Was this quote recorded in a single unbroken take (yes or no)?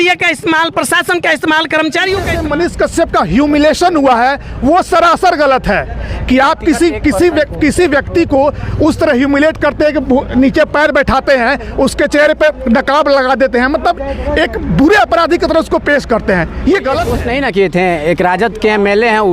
no